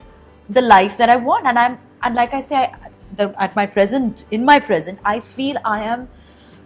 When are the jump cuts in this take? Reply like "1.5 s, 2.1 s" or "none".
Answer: none